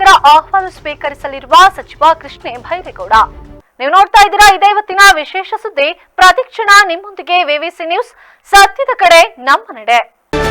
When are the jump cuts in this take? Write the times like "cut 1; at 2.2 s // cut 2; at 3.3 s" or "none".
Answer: none